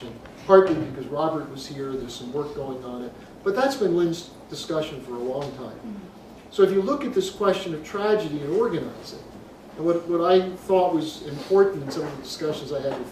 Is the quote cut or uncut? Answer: uncut